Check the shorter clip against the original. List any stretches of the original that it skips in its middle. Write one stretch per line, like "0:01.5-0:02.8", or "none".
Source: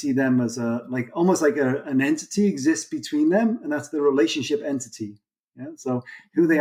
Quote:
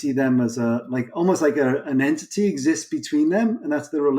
none